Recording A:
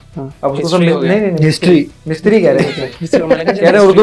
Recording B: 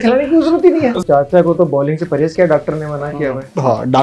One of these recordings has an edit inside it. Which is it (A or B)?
B